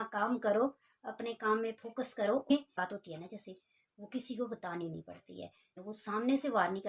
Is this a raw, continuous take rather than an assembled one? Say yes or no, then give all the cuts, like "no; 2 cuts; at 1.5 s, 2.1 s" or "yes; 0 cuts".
no; 2 cuts; at 2.5 s, 5.8 s